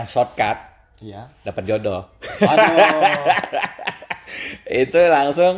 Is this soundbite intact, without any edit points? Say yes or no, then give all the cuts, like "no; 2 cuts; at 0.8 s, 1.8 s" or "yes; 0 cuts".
yes; 0 cuts